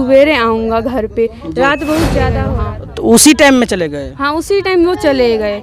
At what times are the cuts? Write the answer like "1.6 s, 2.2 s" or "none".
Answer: 2.5 s